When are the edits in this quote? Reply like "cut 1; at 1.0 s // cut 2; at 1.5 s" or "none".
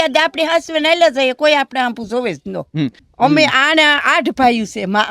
cut 1; at 3.0 s

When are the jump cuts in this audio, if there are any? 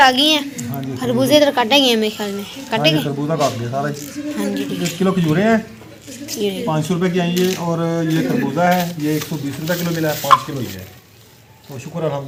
none

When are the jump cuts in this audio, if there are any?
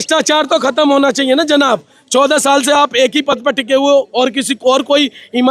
none

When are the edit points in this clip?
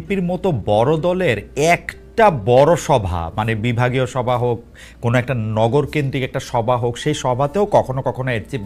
none

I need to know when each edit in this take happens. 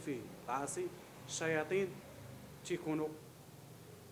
none

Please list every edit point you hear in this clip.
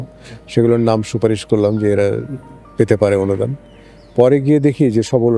none

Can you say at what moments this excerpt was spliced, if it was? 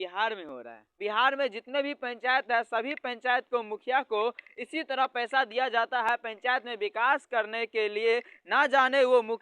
cut 1; at 1.0 s

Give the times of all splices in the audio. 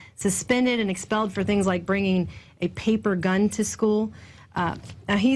none

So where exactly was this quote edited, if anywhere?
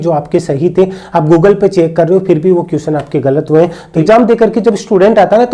cut 1; at 4.0 s

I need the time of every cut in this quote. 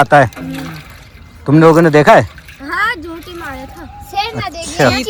none

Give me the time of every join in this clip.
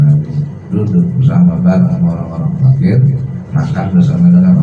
cut 1; at 3.4 s

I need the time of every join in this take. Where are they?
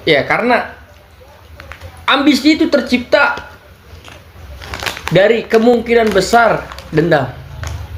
none

